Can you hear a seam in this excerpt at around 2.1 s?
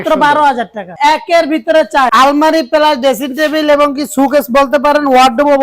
yes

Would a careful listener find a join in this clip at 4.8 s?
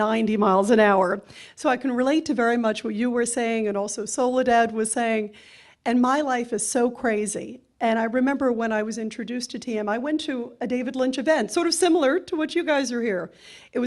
no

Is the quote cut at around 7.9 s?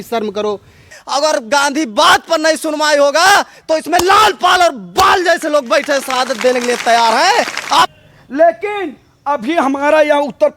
yes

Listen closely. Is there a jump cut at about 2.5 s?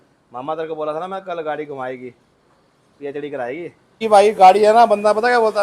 no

